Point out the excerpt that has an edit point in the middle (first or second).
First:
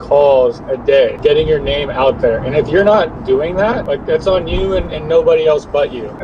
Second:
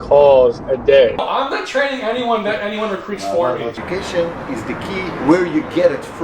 second